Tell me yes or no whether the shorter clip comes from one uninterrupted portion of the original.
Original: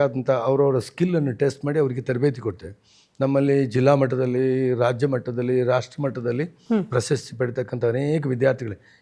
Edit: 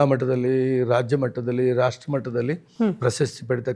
yes